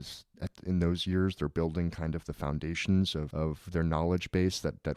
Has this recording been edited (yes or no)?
yes